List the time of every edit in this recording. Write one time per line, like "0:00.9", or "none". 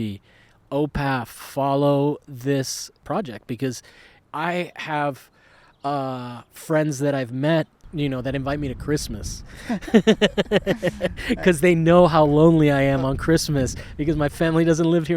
0:03.0
0:04.1
0:07.8